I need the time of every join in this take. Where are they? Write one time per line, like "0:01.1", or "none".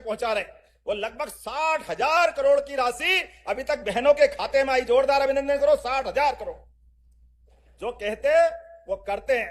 none

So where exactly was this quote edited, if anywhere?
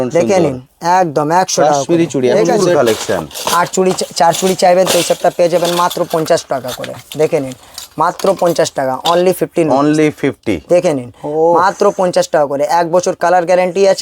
0:02.7

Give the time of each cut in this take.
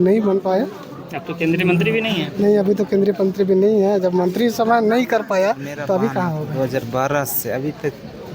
0:06.5

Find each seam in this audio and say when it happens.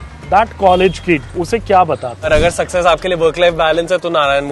0:01.3
0:02.3

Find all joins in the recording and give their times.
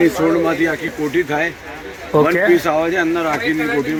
none

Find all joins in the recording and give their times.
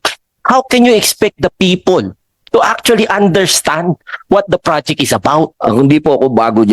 0:05.5

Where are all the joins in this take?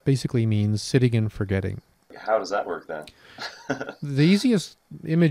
0:02.2

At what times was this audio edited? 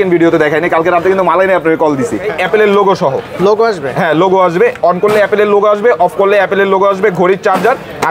0:02.3

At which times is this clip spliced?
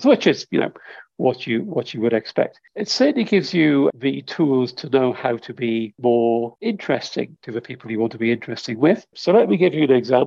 0:02.6
0:03.9
0:05.9
0:06.6
0:07.4
0:09.1

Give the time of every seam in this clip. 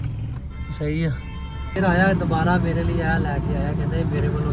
0:01.8

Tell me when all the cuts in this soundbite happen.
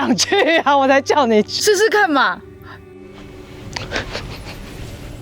0:03.1

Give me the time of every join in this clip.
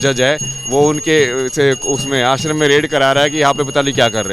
none

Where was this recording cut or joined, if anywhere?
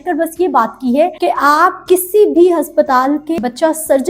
0:01.2

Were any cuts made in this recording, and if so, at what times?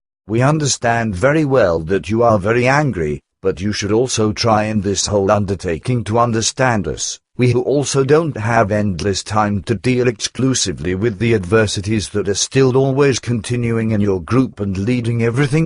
0:13.8

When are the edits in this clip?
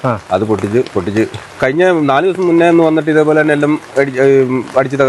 0:01.6

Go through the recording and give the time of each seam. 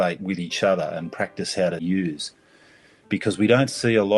0:01.8

